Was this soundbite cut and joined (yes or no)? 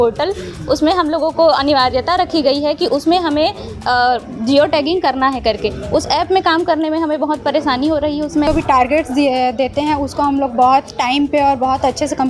yes